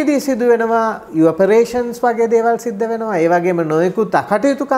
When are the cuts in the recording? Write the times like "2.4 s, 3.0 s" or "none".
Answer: none